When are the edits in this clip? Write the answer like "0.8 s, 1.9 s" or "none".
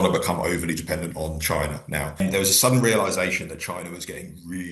2.2 s